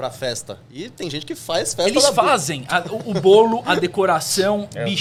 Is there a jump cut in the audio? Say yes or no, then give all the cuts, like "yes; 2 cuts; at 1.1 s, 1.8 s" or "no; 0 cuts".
no; 0 cuts